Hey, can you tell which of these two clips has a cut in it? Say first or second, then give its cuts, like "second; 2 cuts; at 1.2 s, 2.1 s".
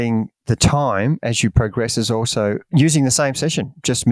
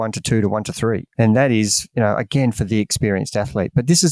second; 1 cut; at 1.1 s